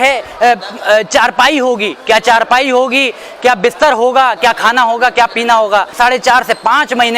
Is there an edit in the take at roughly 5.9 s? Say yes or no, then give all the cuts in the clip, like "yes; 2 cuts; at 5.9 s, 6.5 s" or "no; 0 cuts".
yes; 1 cut; at 5.9 s